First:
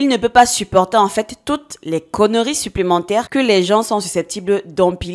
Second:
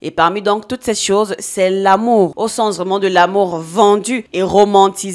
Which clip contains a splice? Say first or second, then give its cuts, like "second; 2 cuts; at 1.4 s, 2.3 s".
second; 1 cut; at 2.3 s